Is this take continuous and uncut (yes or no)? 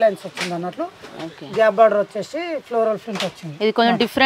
yes